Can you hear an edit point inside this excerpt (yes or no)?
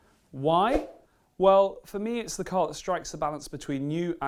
no